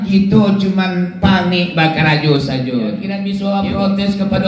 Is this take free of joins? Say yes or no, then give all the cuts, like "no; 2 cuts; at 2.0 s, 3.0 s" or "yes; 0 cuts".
no; 1 cut; at 3.1 s